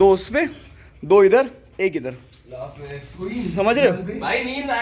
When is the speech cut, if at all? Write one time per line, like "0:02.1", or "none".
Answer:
none